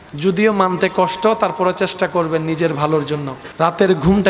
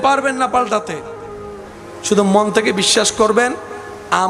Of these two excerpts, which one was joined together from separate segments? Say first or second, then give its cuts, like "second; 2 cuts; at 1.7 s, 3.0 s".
first; 1 cut; at 3.4 s